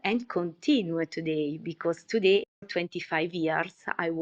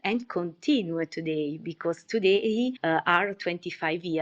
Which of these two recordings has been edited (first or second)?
first